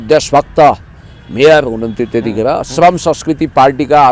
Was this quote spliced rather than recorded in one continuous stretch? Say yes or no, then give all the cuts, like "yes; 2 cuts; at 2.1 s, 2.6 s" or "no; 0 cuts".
no; 0 cuts